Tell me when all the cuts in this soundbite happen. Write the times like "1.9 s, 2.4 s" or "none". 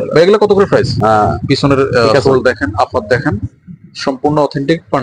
0.9 s